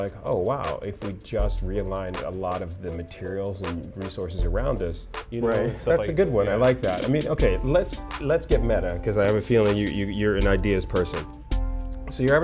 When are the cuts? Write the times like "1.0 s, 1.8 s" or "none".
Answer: 5.1 s